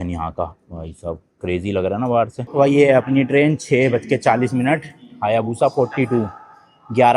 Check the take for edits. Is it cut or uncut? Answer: cut